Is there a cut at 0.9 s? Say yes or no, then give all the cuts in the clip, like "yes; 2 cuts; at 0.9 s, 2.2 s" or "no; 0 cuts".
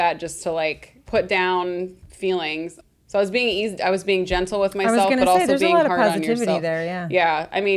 yes; 2 cuts; at 0.9 s, 2.5 s